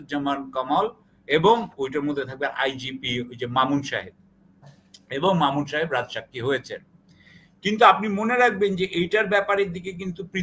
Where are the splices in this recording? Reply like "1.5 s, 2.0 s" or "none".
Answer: none